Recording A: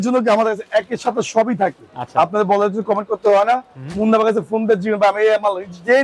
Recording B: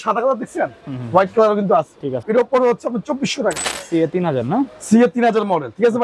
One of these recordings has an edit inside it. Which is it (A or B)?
B